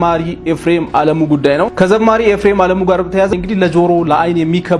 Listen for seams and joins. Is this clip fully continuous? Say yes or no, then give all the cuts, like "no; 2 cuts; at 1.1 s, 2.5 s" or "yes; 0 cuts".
no; 1 cut; at 3.3 s